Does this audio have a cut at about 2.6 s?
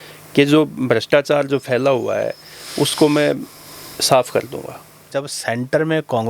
no; 1 cut; at 5.0 s

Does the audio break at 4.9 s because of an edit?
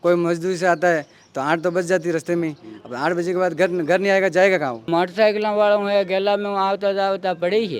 yes; 1 cut; at 4.9 s

